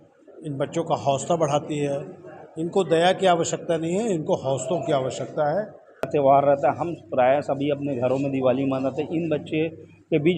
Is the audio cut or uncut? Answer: cut